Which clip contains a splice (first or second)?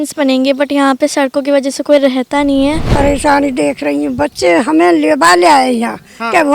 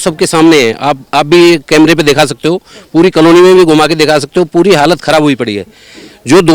first